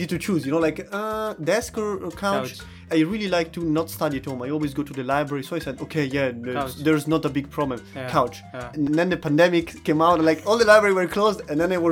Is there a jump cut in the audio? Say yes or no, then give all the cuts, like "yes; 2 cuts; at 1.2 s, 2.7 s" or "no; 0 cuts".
yes; 3 cuts; at 2.8 s, 8.8 s, 9.7 s